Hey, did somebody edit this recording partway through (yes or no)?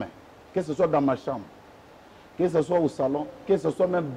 no